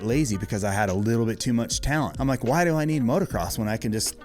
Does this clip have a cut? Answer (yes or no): yes